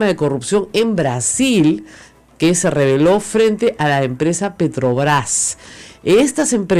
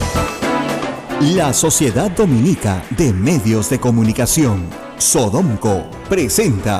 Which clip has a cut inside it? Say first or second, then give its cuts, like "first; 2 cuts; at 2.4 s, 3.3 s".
second; 1 cut; at 1.0 s